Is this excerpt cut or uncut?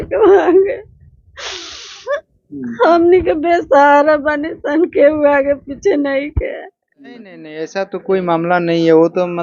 cut